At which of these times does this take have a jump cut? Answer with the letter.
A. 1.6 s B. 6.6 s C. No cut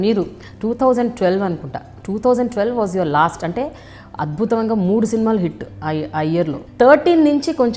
B